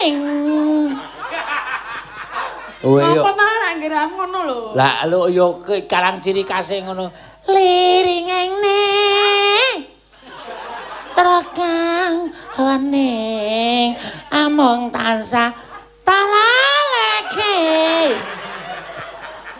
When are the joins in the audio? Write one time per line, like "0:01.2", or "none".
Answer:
0:03.7